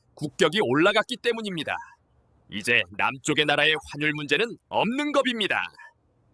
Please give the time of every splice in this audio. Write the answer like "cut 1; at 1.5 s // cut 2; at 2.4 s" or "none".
none